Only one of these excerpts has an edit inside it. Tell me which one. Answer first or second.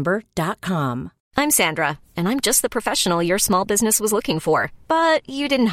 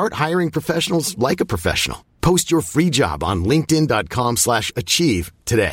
first